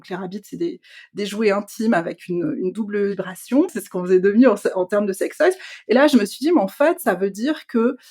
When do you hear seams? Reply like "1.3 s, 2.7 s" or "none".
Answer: 3.7 s